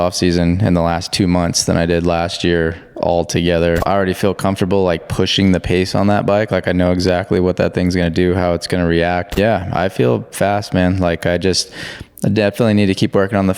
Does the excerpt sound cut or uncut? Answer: cut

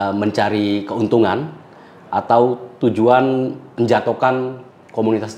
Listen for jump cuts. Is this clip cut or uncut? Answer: uncut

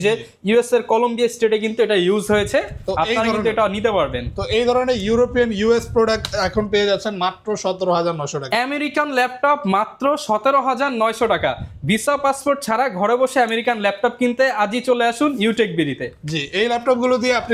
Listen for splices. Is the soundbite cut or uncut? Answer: uncut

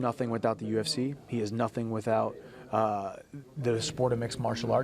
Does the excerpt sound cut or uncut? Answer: uncut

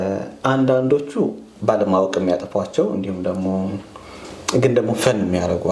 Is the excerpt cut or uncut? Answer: uncut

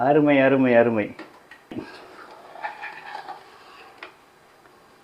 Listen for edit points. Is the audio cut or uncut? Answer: cut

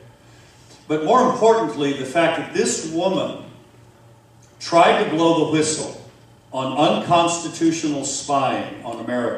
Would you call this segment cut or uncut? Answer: cut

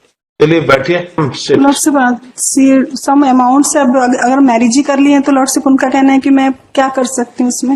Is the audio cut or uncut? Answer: cut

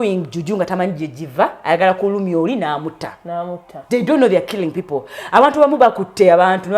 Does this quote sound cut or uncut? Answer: uncut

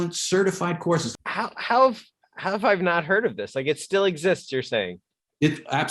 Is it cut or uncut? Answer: cut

